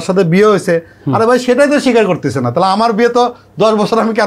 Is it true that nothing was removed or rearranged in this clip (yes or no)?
yes